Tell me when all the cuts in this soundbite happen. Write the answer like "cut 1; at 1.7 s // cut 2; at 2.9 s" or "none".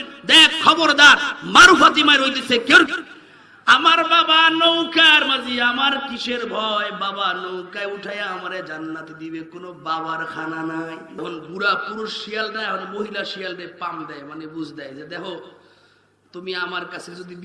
cut 1; at 2.9 s // cut 2; at 11.1 s